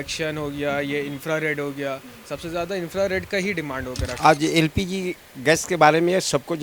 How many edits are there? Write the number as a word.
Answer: one